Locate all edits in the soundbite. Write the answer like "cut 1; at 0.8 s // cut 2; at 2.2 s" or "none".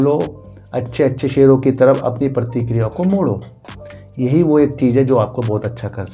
none